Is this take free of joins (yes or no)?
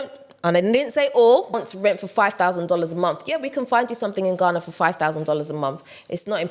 no